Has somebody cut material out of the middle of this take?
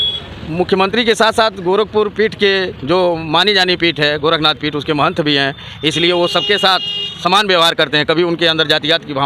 no; 0 cuts

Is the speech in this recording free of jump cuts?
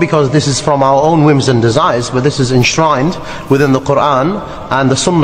yes; 0 cuts

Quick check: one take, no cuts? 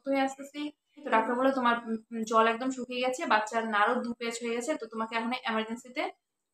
no; 1 cut; at 1.1 s

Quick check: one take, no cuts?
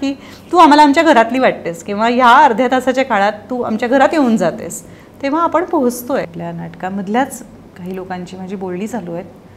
no; 1 cut; at 6.3 s

